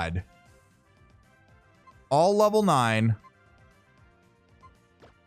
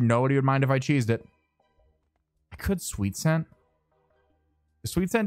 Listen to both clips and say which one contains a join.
first; 1 cut; at 1.8 s

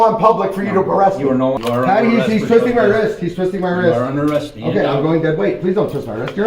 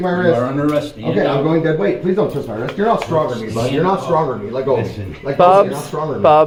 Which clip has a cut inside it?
first; 1 cut; at 1.6 s

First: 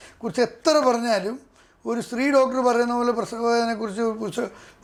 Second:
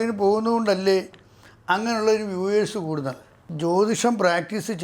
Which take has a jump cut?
second; 1 cut; at 3.4 s

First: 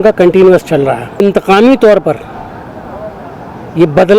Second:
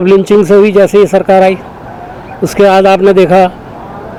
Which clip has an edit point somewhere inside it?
first; 1 cut; at 1.2 s

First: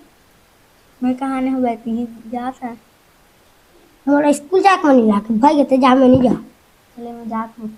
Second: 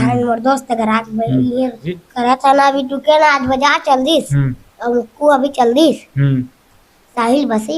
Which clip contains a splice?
second; 1 cut; at 1.9 s

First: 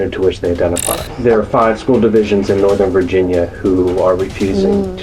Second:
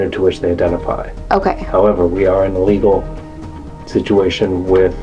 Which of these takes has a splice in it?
first; 1 cut; at 1.1 s

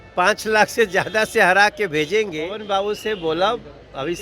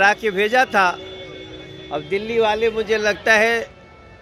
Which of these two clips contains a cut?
first; 1 cut; at 2.6 s

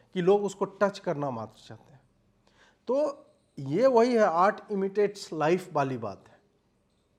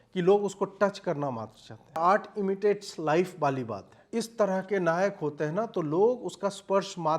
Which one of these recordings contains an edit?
second; 2 cuts; at 2.0 s, 4.0 s

